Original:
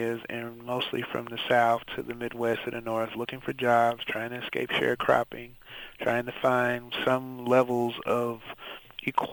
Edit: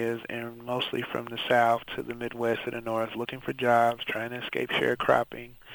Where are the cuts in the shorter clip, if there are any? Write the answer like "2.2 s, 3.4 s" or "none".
none